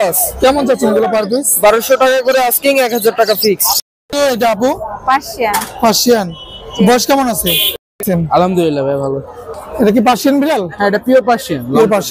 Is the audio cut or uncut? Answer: cut